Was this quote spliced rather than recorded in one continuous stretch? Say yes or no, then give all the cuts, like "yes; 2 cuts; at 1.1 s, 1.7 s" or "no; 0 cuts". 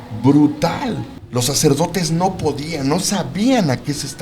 yes; 1 cut; at 1.1 s